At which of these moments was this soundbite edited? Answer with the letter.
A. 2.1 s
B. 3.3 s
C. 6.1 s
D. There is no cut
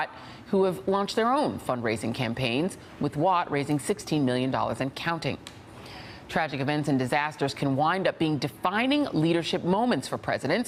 D